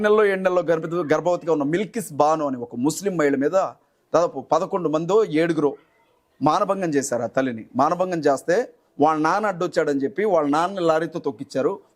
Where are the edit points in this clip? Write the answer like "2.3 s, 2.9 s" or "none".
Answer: none